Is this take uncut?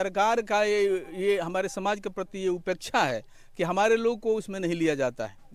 yes; 0 cuts

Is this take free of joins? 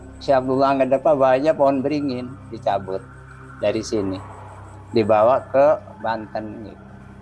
yes; 0 cuts

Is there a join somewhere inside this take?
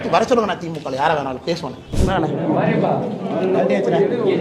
yes; 1 cut; at 1.9 s

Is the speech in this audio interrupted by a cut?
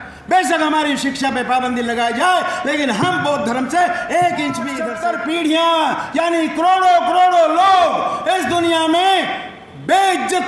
yes; 1 cut; at 4.8 s

